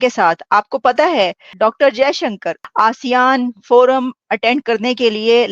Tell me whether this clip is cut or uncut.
cut